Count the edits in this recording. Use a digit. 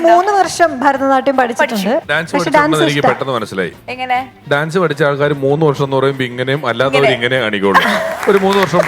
1